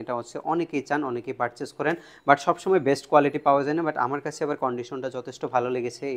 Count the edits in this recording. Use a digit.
0